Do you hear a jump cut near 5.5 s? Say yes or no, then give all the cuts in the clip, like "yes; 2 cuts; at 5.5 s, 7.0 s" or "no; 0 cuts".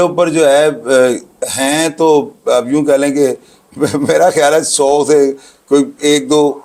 no; 0 cuts